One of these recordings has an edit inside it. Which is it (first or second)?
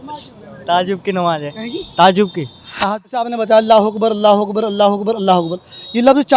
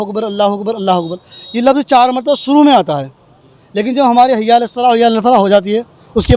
first